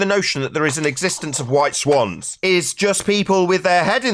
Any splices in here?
yes; 1 cut; at 2.3 s

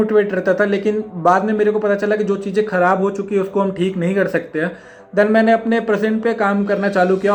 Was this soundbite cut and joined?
no; 0 cuts

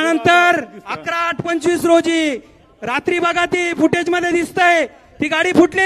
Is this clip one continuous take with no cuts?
yes; 0 cuts

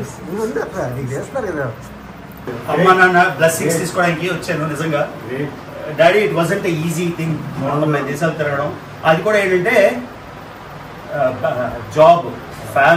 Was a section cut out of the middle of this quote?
yes; 1 cut; at 2.5 s

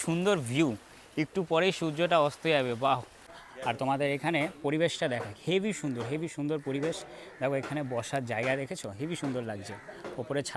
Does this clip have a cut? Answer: yes; 1 cut; at 3.3 s

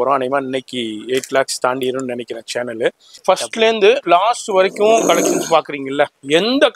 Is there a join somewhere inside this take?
yes; 1 cut; at 3.1 s

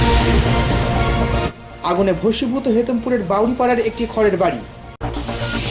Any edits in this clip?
no; 0 cuts

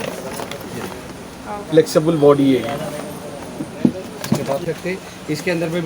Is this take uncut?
no; 1 cut; at 4.6 s

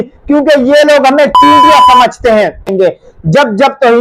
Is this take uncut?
no; 1 cut; at 2.7 s

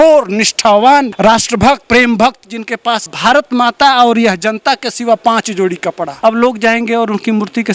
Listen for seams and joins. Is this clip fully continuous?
no; 3 cuts; at 1.6 s, 3.1 s, 6.1 s

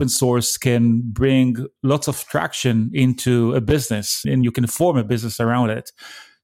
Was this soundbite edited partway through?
yes; 1 cut; at 4.2 s

